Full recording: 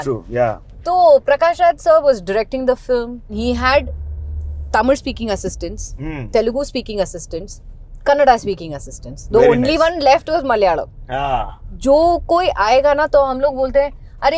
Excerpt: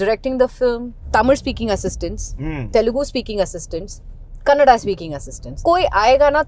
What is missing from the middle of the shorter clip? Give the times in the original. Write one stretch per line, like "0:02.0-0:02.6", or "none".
0:03.2-0:04.5
0:09.2-0:12.2